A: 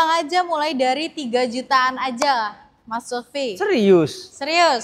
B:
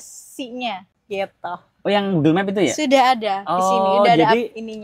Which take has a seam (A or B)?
B